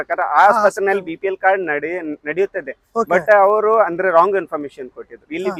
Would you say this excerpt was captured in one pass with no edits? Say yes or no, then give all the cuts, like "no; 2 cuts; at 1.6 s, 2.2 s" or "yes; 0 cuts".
yes; 0 cuts